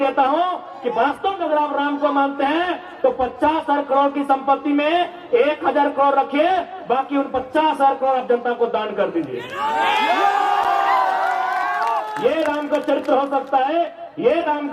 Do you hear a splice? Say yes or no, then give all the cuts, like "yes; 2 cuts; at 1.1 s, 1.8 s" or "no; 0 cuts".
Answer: no; 0 cuts